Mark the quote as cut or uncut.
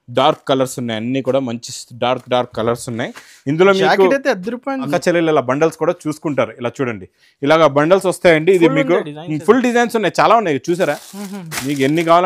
cut